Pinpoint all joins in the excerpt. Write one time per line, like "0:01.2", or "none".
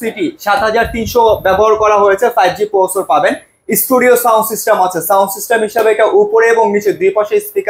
none